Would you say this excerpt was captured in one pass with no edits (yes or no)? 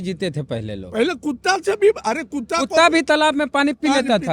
yes